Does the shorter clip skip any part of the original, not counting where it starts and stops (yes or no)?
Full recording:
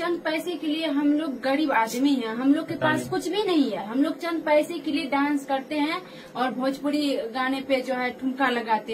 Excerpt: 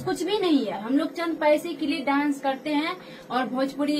no